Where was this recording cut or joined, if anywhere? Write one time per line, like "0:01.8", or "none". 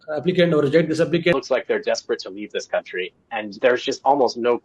0:01.3
0:03.5